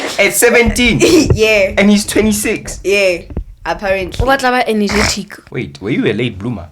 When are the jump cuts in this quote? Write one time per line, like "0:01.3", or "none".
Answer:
0:05.3

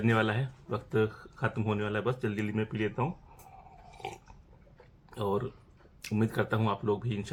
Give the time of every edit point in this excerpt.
none

